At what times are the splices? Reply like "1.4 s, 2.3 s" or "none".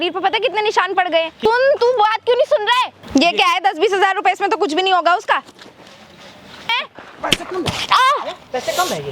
1.4 s, 3.0 s, 6.7 s